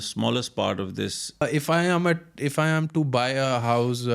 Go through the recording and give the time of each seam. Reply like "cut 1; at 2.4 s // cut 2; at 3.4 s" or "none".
cut 1; at 1.4 s